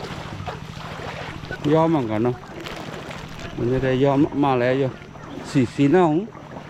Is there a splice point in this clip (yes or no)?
yes